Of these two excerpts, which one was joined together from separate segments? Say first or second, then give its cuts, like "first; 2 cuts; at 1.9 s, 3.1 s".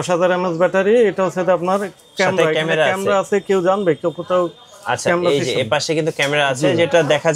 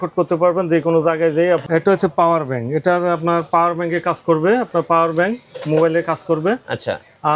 second; 1 cut; at 1.6 s